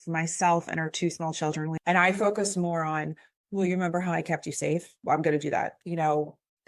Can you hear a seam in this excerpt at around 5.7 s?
yes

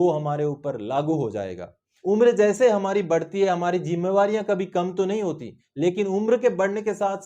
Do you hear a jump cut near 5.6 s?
no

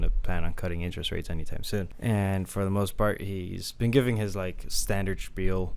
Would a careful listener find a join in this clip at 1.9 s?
yes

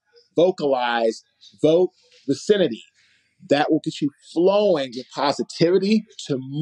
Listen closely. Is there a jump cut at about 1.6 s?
no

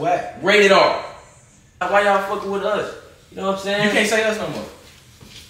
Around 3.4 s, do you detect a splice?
no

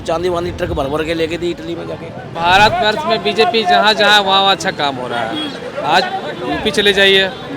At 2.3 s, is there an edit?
yes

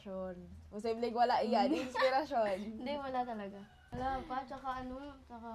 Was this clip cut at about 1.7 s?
no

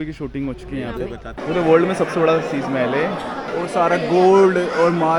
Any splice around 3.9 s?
no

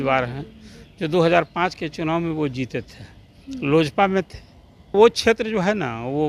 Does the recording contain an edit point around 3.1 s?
no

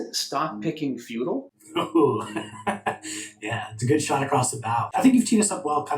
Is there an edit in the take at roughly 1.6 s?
yes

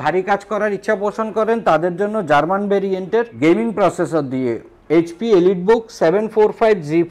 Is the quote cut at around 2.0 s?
no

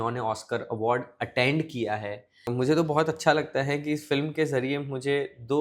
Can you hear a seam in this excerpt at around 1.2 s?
no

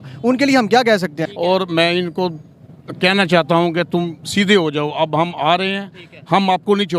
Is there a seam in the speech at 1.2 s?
yes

